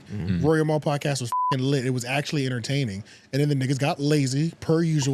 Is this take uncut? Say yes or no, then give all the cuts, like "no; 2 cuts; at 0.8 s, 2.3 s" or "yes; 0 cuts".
yes; 0 cuts